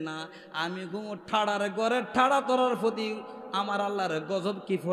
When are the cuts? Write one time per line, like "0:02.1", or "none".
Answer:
none